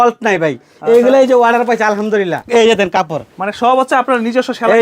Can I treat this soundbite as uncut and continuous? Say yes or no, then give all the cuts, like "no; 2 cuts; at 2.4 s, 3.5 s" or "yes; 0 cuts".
no; 1 cut; at 2.4 s